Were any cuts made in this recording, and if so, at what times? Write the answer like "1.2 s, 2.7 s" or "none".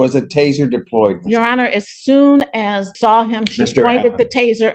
2.9 s